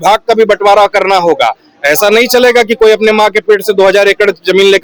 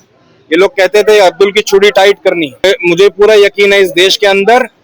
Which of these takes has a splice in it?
second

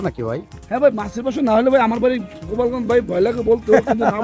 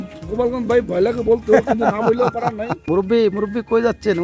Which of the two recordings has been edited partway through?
second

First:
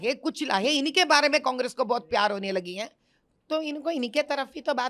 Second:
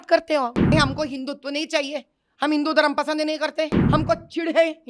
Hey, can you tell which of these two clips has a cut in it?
second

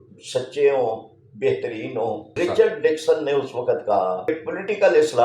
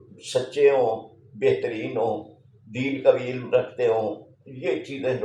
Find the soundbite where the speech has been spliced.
first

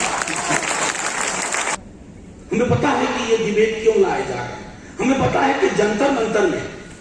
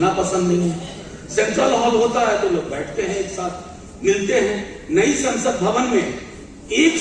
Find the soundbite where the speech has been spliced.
first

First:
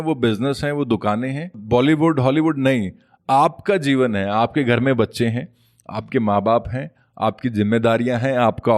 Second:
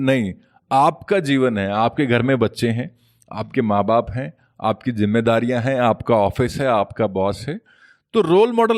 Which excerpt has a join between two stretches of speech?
first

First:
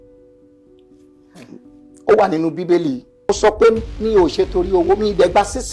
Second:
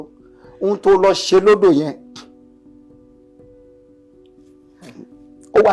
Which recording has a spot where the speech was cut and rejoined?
first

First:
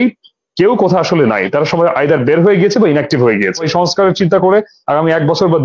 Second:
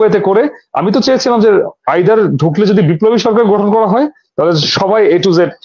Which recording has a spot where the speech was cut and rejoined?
first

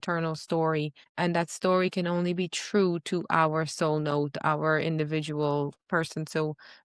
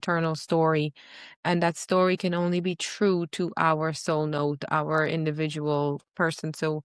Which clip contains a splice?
first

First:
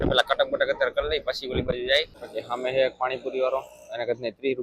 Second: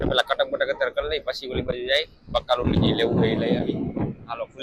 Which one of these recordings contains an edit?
first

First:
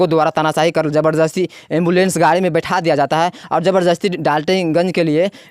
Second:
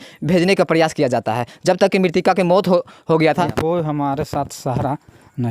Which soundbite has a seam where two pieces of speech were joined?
second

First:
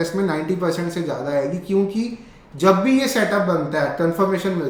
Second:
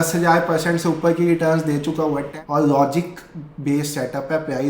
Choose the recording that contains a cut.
second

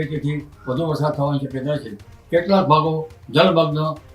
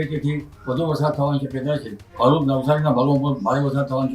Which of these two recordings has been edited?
second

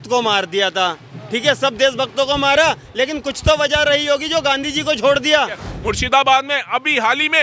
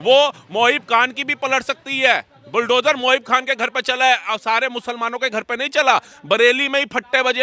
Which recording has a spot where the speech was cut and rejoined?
first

